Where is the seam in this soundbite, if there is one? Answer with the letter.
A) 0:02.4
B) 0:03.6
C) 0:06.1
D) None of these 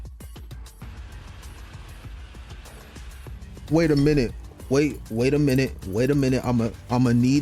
B